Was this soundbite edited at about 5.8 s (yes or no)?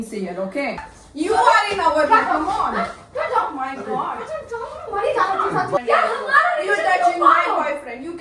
yes